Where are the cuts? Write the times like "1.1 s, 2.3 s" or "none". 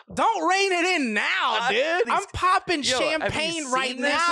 2.1 s